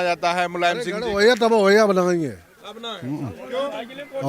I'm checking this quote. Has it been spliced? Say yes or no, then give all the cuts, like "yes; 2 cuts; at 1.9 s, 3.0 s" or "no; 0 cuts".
no; 0 cuts